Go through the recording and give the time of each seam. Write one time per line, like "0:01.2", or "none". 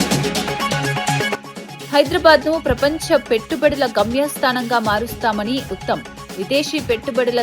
0:01.4